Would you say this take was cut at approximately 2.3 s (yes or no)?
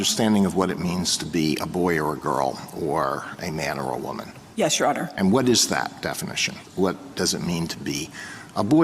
no